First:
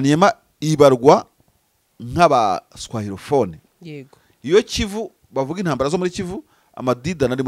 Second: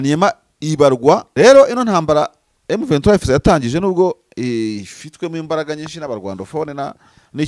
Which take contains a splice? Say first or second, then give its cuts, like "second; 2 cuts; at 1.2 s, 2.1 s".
second; 1 cut; at 1.3 s